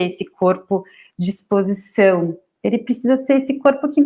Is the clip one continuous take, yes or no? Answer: yes